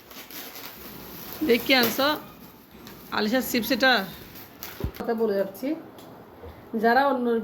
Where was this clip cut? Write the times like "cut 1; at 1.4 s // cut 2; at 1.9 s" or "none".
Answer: cut 1; at 5.0 s